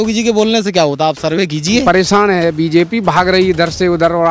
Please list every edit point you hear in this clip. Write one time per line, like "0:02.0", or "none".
0:01.8